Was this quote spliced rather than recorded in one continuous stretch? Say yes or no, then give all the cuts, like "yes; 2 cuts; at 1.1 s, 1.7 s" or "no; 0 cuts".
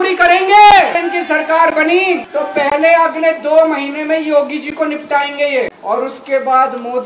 yes; 3 cuts; at 0.9 s, 2.3 s, 5.8 s